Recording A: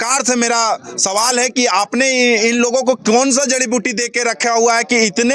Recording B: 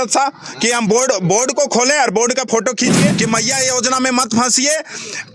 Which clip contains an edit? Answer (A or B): B